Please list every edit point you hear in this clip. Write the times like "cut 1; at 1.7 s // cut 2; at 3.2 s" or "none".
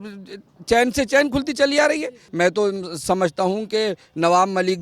cut 1; at 2.2 s